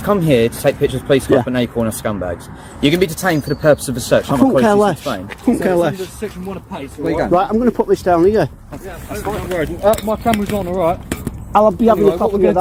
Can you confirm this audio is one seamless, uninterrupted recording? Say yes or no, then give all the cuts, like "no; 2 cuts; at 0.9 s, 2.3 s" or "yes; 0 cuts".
yes; 0 cuts